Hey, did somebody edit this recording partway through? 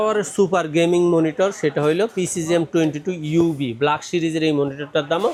no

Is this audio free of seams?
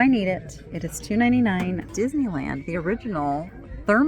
no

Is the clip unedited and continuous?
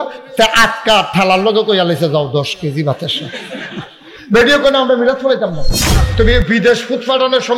no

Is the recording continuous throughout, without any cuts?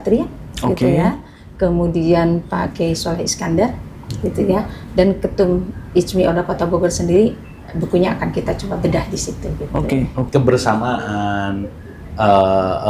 no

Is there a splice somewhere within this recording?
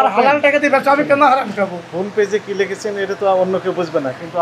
no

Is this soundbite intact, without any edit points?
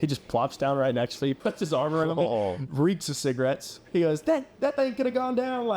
no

